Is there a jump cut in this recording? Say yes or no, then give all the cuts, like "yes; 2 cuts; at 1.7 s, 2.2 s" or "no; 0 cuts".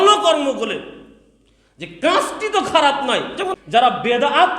yes; 1 cut; at 3.6 s